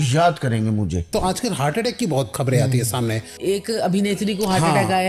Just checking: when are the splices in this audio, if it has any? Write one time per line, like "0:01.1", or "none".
0:01.1
0:02.3
0:03.4